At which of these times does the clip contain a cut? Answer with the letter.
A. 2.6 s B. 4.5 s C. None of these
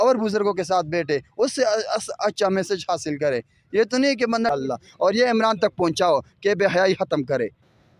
B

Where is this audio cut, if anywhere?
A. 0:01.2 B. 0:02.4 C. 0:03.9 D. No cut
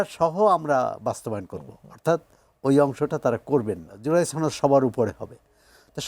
C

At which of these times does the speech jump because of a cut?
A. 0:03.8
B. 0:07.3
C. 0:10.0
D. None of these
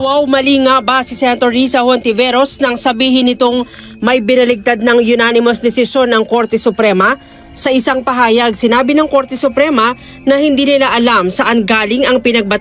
C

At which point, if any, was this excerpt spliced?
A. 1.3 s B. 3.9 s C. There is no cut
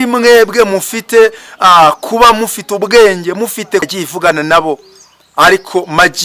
B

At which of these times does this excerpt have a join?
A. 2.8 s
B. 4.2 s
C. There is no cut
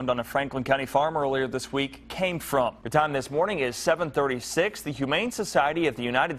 A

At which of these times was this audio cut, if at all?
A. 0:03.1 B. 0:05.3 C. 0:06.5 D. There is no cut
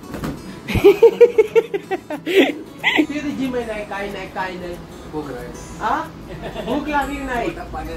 A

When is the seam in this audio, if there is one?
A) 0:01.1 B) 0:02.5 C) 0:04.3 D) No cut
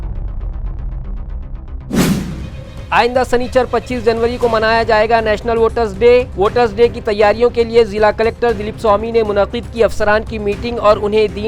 B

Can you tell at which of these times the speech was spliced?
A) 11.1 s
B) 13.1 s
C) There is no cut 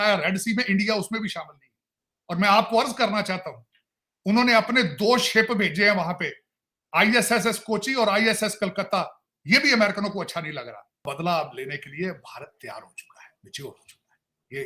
A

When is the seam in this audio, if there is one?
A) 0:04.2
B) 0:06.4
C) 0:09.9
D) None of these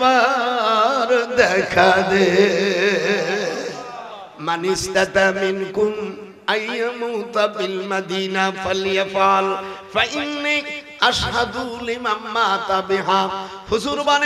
A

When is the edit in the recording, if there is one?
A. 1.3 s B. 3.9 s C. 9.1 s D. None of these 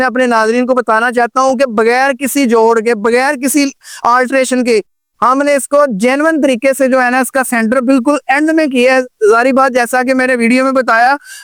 D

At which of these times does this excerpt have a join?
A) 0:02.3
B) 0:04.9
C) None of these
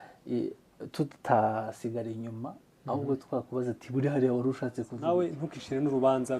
B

